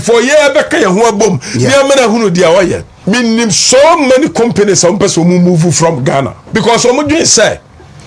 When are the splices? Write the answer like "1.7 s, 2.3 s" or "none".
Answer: 2.9 s, 6.4 s